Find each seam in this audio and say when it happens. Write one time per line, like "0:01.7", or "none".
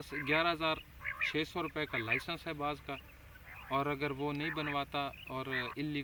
none